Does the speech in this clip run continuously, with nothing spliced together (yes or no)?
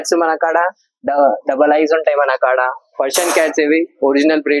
yes